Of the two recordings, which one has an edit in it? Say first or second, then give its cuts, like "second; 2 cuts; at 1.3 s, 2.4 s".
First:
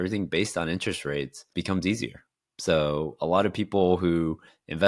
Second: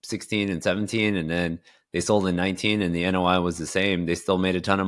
first; 1 cut; at 1.5 s